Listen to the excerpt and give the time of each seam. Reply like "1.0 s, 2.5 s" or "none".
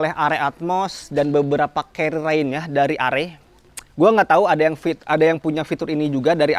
none